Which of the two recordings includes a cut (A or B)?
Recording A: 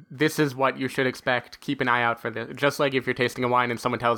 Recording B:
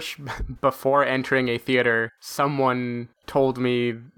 B